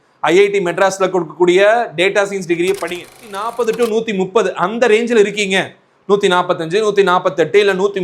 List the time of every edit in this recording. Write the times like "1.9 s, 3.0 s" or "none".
3.4 s